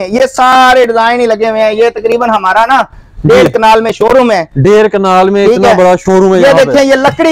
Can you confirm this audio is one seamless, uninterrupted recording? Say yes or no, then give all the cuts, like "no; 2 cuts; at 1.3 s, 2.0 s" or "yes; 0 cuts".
yes; 0 cuts